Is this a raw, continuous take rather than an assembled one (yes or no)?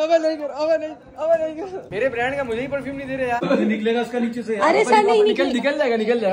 no